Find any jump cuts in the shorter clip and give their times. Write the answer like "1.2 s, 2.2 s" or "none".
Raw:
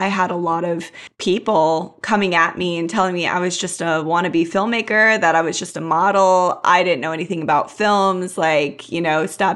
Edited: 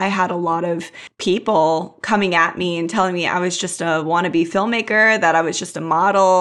none